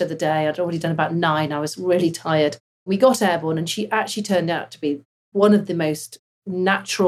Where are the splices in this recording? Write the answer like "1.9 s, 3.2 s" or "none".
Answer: 2.7 s